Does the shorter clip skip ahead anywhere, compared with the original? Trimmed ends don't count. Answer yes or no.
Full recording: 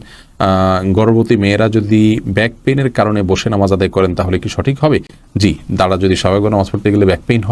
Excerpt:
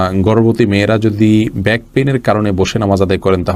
no